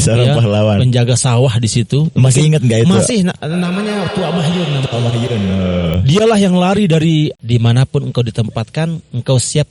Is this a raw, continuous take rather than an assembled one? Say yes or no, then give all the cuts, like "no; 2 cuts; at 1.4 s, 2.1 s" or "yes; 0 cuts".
no; 1 cut; at 7.4 s